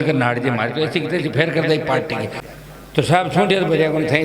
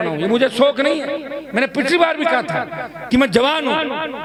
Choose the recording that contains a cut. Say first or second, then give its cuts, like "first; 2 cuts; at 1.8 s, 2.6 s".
first; 1 cut; at 2.4 s